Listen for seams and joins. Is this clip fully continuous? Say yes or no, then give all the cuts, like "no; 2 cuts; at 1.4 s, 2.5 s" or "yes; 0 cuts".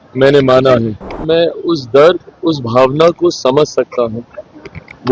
no; 1 cut; at 1.1 s